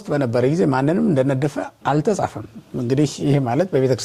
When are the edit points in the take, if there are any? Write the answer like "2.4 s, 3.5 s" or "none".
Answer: none